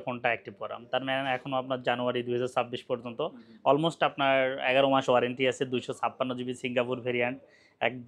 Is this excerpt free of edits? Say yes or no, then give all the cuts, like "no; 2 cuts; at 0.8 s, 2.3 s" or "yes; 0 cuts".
yes; 0 cuts